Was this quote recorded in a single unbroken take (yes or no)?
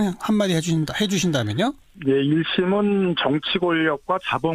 yes